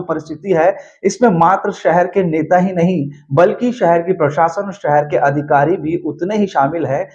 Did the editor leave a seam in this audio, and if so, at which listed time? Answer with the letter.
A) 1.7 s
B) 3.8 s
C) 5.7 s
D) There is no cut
D